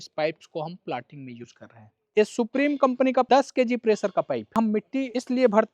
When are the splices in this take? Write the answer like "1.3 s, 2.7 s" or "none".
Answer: 2.1 s, 3.3 s, 4.8 s